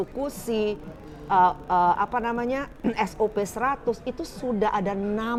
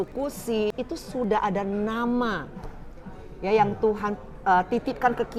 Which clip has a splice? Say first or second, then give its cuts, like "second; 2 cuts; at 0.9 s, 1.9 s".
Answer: second; 1 cut; at 1.2 s